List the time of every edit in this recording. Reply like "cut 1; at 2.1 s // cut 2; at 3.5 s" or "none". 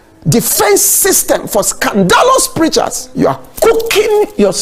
cut 1; at 3.0 s